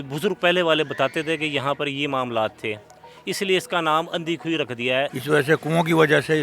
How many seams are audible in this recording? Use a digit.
1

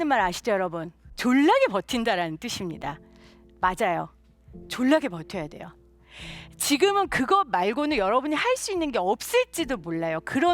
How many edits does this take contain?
1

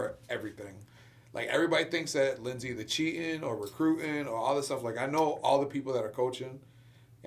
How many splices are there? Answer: 0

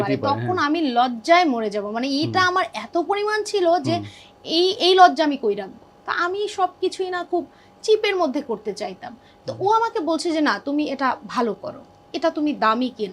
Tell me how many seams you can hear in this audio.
1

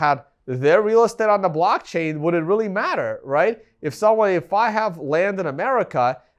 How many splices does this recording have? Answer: 0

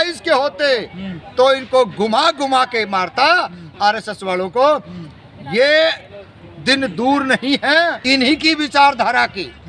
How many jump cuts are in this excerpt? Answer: 1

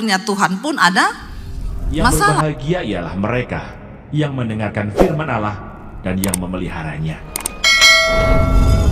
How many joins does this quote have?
1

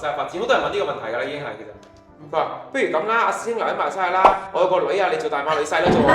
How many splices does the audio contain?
1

